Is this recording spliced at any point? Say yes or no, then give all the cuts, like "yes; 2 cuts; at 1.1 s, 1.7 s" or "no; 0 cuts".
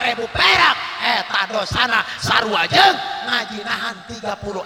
no; 0 cuts